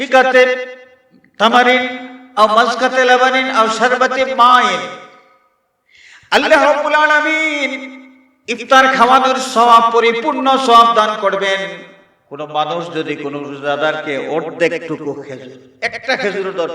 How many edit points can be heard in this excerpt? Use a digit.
1